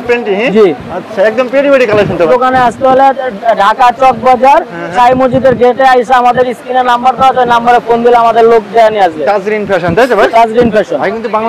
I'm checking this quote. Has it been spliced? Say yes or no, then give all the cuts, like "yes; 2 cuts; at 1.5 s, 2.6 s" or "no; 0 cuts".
yes; 1 cut; at 2.3 s